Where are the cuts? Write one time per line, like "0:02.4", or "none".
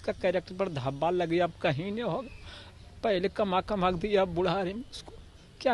none

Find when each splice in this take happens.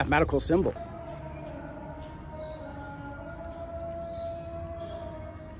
none

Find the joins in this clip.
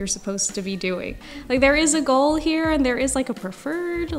0:01.4

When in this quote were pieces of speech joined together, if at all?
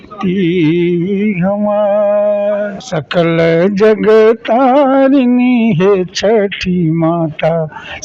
0:02.8

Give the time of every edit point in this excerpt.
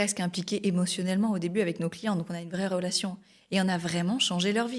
none

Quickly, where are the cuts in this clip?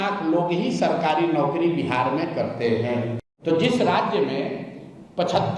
0:03.2

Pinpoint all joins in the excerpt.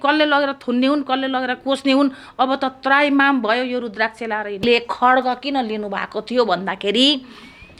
0:04.6

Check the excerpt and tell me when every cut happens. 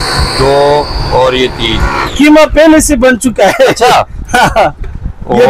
none

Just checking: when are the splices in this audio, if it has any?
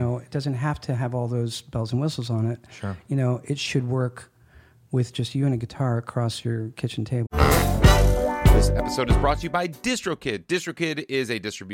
0:07.3

